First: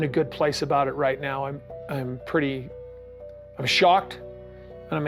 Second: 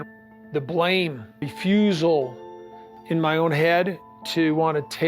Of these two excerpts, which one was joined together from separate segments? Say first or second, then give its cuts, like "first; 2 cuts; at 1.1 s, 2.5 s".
second; 1 cut; at 1.4 s